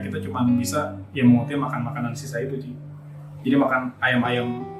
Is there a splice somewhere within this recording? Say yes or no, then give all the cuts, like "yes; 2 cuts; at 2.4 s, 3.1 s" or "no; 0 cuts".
no; 0 cuts